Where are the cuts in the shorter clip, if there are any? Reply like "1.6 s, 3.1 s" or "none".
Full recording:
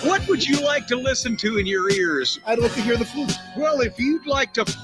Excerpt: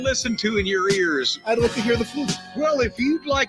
none